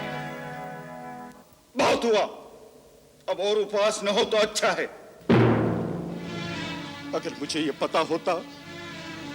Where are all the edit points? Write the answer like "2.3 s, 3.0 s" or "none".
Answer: 6.5 s